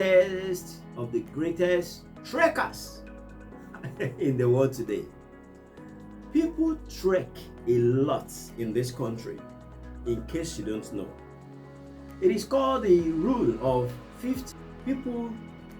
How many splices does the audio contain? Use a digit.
1